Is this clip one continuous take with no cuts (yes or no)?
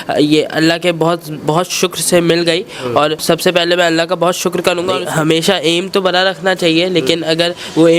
no